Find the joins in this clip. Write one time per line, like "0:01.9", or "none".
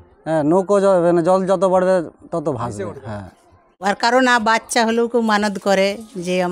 0:03.6